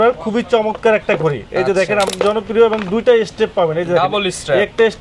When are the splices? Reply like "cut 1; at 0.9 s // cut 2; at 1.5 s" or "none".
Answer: cut 1; at 2.1 s